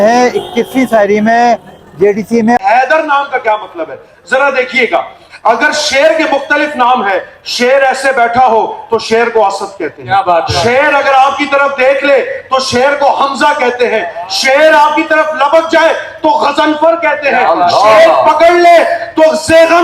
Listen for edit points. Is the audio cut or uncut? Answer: cut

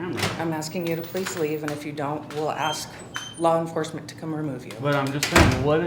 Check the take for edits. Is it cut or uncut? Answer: uncut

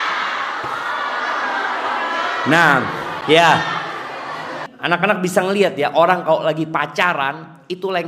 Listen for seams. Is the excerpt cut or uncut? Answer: cut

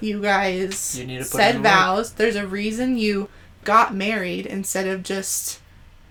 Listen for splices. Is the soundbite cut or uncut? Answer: uncut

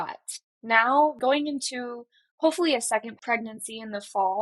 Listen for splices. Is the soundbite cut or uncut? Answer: cut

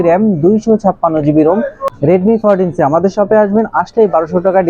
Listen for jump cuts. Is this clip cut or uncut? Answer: cut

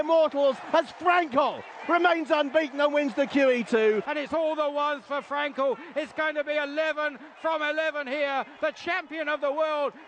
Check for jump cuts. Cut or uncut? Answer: cut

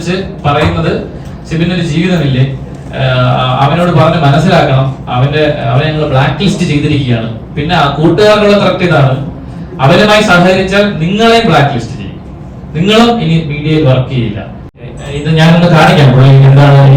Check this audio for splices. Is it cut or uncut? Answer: cut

